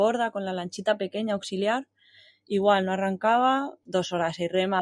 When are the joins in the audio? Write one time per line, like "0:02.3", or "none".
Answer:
0:03.8